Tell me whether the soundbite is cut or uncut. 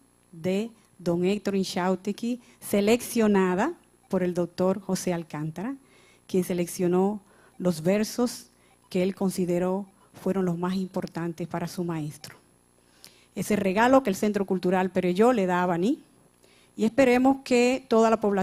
uncut